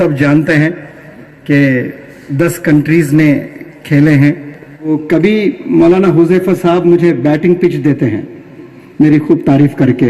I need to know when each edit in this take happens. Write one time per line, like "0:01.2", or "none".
0:04.9